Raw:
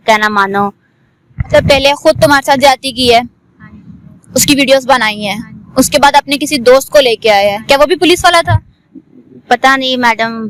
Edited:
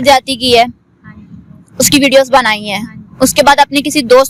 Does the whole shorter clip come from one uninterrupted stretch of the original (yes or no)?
yes